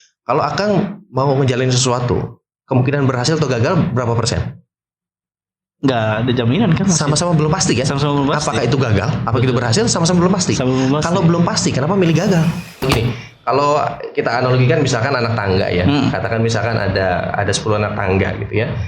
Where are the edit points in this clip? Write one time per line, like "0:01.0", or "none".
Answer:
0:12.8